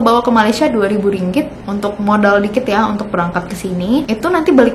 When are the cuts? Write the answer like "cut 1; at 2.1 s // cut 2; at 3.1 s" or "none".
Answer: cut 1; at 1.6 s